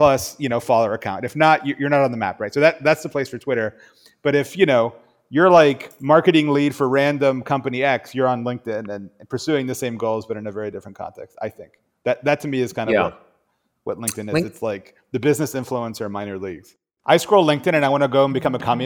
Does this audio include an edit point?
yes; 1 cut; at 16.9 s

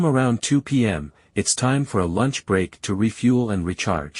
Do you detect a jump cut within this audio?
yes; 1 cut; at 1.1 s

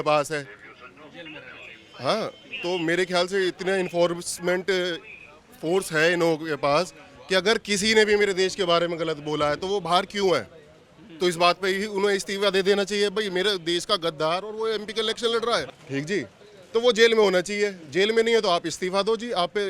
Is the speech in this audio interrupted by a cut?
no; 0 cuts

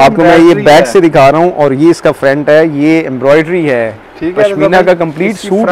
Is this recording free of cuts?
yes; 0 cuts

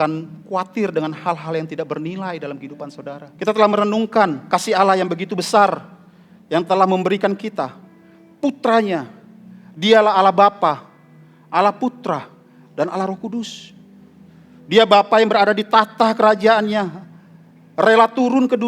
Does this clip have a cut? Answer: yes; 2 cuts; at 3.3 s, 4.4 s

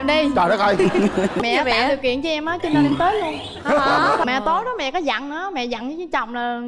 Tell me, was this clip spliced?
yes; 2 cuts; at 1.4 s, 4.2 s

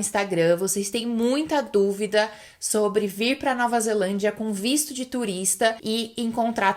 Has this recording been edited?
yes; 1 cut; at 5.8 s

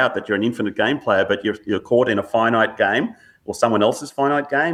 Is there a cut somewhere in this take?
no; 0 cuts

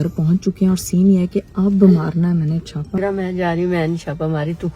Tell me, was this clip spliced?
yes; 1 cut; at 3.0 s

